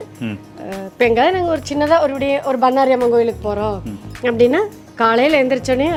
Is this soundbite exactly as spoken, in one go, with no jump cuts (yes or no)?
yes